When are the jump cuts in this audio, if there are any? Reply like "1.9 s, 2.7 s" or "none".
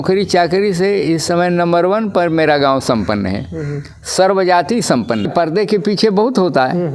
5.3 s